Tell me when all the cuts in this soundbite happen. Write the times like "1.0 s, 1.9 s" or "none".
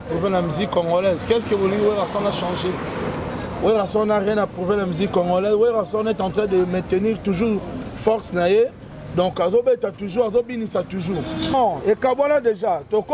11.5 s

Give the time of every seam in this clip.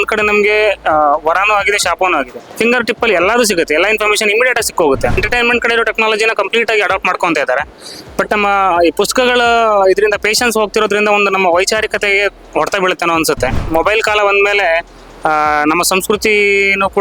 2.4 s, 5.2 s, 13.6 s

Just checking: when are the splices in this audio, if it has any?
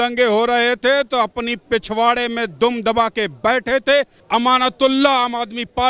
4.2 s

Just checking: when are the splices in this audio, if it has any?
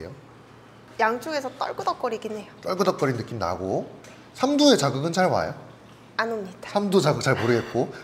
none

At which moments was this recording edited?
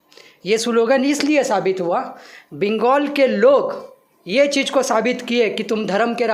none

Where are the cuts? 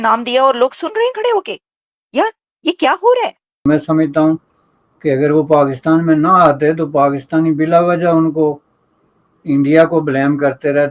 3.6 s

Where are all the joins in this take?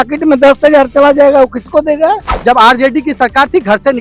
2.3 s

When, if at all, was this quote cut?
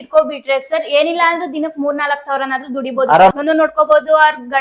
3.3 s

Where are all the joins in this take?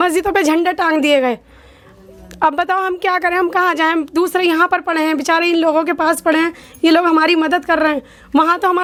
none

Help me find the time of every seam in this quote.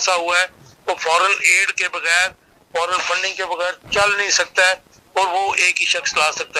none

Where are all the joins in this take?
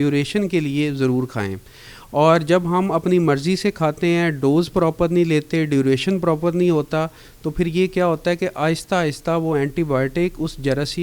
none

